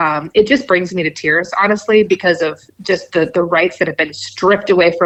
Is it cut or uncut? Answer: uncut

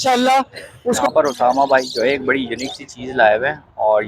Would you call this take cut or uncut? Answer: cut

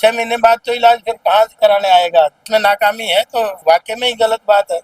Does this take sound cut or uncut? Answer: cut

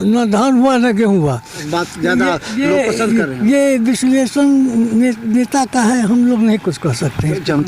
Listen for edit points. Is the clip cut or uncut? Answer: cut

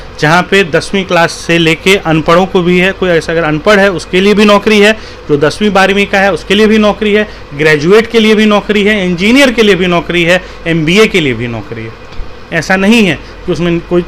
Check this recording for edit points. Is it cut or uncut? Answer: uncut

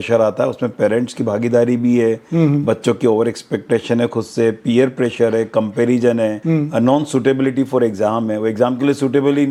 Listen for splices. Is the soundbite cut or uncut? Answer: uncut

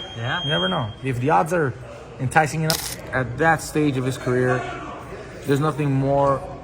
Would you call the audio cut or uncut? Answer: cut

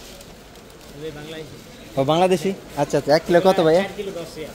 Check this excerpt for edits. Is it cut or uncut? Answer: uncut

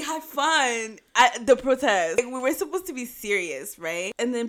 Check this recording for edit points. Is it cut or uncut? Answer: cut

